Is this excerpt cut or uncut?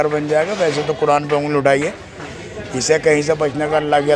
uncut